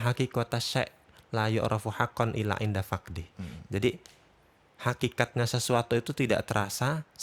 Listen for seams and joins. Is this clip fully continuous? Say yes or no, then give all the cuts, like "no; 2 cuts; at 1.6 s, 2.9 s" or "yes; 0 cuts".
yes; 0 cuts